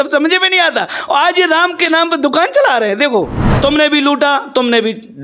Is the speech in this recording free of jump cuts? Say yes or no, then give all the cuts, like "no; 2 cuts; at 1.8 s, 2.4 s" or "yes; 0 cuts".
no; 1 cut; at 3.6 s